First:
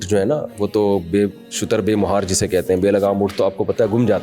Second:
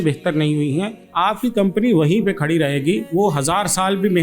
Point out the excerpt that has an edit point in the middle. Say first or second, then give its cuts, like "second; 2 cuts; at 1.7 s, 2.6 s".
second; 2 cuts; at 1.0 s, 3.1 s